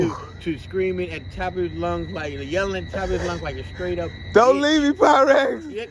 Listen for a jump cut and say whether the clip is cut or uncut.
uncut